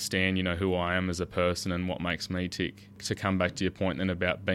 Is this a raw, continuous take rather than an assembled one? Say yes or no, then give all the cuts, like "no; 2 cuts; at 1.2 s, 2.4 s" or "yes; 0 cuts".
no; 1 cut; at 3.0 s